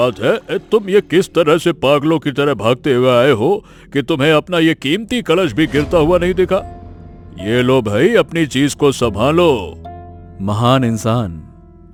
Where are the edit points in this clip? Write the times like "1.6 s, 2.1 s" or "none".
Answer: none